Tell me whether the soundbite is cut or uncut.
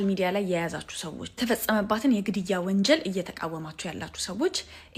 uncut